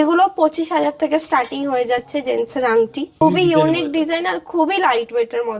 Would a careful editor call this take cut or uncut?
cut